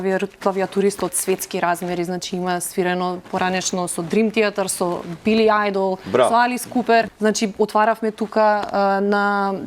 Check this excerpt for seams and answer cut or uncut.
cut